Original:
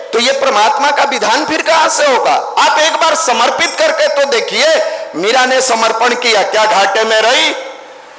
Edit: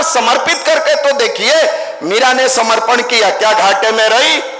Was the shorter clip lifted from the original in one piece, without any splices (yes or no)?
yes